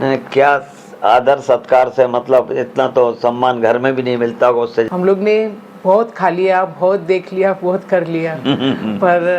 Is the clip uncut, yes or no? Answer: no